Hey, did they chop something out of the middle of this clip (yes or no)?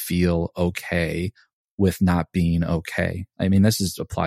yes